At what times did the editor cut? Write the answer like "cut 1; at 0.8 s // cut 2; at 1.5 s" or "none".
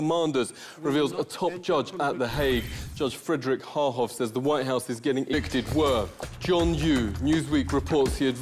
none